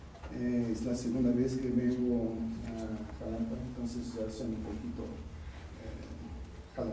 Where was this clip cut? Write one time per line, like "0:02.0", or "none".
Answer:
0:02.5